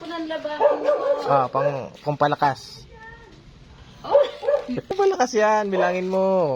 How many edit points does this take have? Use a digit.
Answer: 1